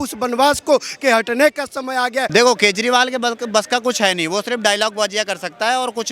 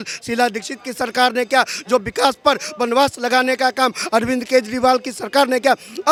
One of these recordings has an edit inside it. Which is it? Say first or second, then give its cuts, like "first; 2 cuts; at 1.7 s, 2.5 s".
first; 1 cut; at 2.3 s